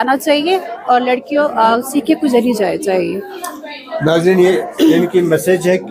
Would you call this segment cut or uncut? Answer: uncut